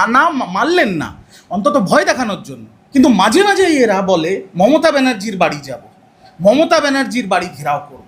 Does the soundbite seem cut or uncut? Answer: cut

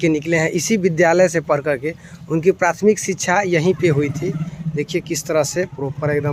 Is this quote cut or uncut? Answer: uncut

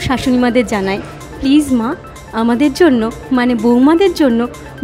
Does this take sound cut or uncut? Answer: uncut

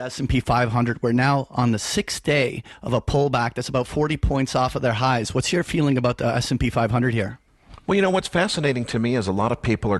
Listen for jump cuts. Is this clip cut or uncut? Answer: cut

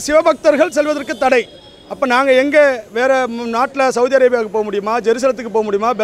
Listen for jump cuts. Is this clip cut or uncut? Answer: uncut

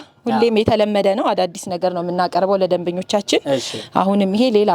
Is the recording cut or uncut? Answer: uncut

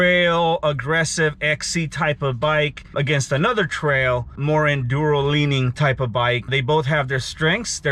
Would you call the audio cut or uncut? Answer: cut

